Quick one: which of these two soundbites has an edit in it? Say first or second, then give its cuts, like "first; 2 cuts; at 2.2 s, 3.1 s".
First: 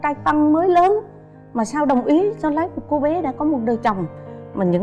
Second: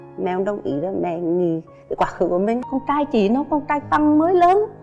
second; 1 cut; at 2.7 s